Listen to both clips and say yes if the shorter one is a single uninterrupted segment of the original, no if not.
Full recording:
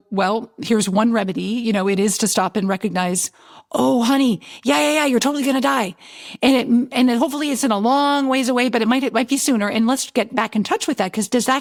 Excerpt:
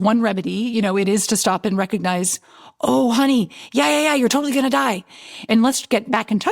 no